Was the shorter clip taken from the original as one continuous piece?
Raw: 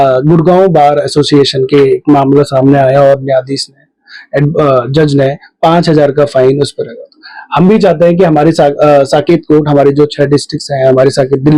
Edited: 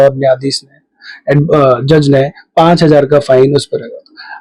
yes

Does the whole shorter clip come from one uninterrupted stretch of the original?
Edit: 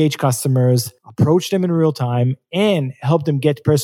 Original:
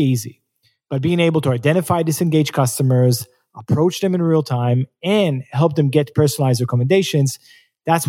no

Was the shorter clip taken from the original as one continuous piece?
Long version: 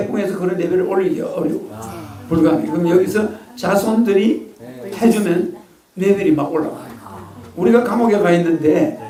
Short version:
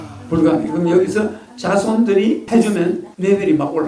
no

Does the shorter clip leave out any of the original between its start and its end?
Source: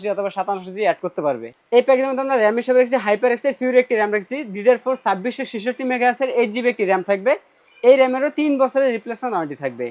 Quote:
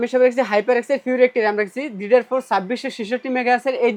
no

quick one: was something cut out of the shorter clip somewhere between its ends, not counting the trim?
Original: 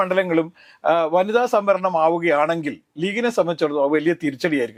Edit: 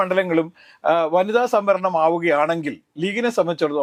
no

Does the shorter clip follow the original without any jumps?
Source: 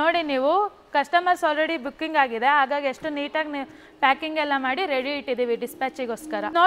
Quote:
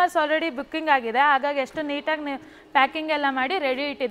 yes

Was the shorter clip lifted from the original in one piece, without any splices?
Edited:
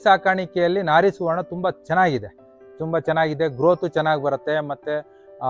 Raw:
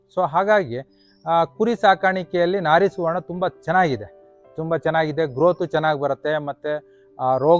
yes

